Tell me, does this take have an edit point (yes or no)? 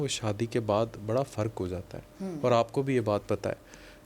no